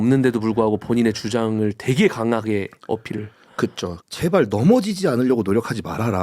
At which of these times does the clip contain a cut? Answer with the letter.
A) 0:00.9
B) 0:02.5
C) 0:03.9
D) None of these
C